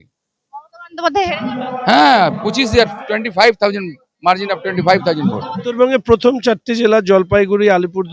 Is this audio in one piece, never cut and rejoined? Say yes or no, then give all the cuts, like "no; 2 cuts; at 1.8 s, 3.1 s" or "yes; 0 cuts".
no; 1 cut; at 5.8 s